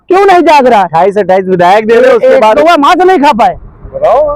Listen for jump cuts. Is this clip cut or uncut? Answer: cut